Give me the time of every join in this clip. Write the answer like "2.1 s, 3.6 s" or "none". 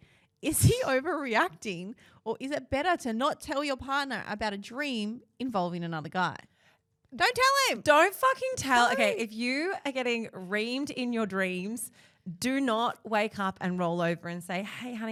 none